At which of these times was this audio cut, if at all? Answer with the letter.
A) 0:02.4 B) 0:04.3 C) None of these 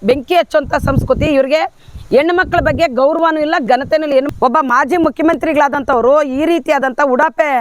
B